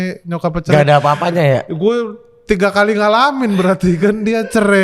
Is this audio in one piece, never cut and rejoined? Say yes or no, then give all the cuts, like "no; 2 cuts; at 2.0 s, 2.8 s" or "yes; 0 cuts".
yes; 0 cuts